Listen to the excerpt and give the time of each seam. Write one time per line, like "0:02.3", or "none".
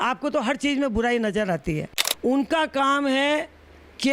0:02.0